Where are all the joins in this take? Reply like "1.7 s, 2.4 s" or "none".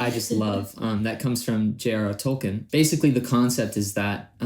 2.6 s